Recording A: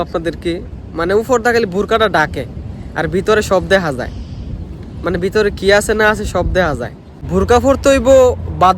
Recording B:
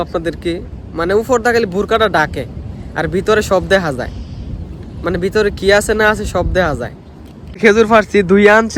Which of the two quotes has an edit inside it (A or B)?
A